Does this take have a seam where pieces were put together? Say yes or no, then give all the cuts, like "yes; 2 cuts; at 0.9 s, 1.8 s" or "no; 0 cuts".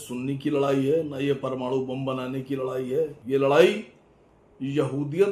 yes; 1 cut; at 3.2 s